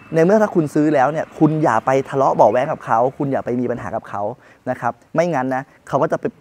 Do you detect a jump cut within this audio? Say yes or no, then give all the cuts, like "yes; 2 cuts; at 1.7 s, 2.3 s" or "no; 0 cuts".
no; 0 cuts